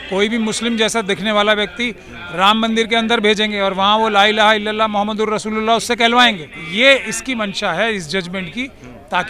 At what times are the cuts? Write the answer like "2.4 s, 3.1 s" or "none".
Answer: 6.6 s

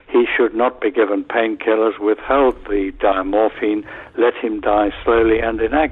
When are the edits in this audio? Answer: none

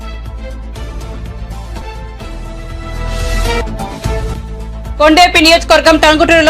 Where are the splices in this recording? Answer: 0.9 s

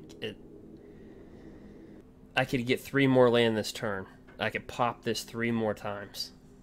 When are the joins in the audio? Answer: 2.0 s

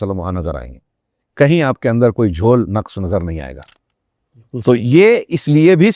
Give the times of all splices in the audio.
none

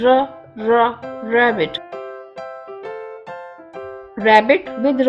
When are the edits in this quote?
1.7 s, 4.0 s

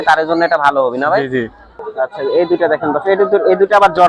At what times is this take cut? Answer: 1.7 s

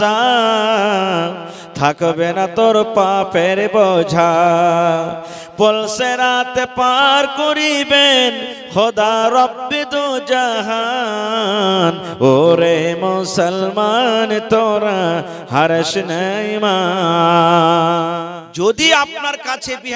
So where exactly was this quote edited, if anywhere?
18.2 s

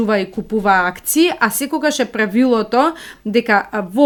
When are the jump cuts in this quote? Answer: none

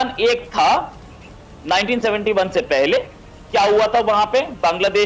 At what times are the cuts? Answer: none

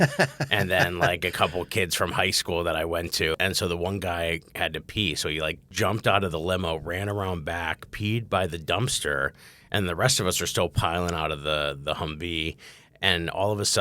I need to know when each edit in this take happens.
3.3 s, 5.6 s

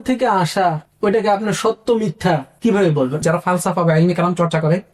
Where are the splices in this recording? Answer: 3.2 s

